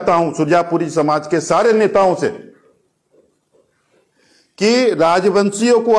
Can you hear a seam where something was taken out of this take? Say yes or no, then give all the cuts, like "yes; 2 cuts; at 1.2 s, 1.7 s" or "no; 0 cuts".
no; 0 cuts